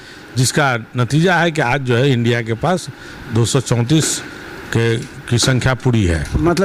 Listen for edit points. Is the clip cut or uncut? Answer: uncut